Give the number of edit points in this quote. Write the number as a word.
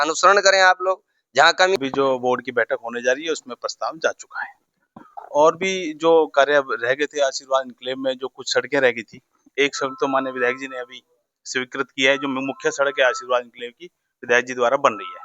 one